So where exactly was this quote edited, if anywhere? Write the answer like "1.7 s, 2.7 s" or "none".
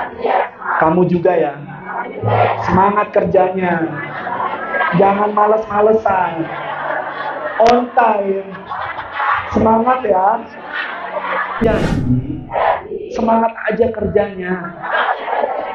11.6 s